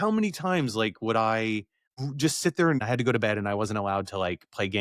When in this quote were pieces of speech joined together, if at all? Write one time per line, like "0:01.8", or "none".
0:01.8
0:02.8